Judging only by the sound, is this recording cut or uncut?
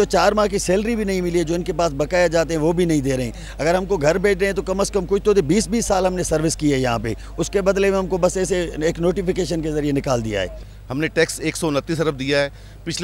cut